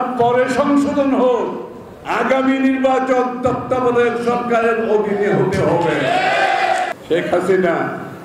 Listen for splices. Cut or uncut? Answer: cut